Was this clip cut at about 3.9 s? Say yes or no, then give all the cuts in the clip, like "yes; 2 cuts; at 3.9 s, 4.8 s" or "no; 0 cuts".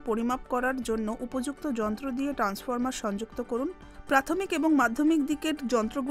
yes; 1 cut; at 3.9 s